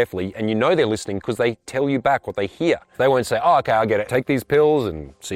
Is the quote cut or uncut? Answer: cut